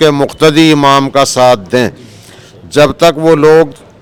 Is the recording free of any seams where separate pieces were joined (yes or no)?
yes